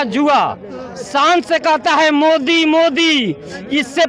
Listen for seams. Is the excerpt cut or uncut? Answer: uncut